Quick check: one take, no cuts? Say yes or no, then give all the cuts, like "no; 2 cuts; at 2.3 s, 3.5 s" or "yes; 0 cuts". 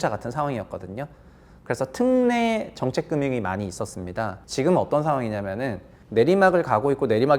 no; 1 cut; at 4.4 s